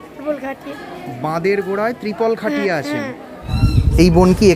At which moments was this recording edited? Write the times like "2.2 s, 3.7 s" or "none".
3.5 s